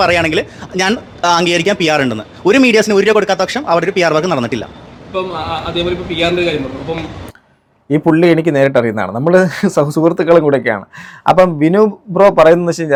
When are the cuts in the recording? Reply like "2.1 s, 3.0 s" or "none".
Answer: none